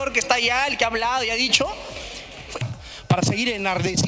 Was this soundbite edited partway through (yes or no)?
yes